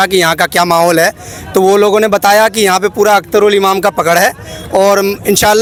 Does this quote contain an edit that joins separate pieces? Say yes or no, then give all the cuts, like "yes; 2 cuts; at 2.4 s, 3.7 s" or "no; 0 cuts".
no; 0 cuts